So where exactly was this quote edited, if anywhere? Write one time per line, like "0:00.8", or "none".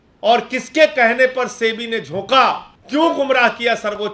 0:02.7